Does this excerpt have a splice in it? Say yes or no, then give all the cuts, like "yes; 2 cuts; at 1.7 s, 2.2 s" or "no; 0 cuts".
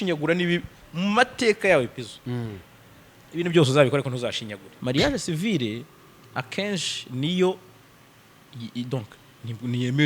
yes; 1 cut; at 4.8 s